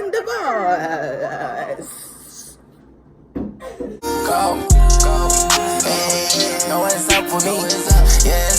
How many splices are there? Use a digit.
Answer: 1